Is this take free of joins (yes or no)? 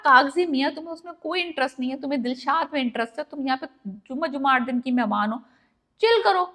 yes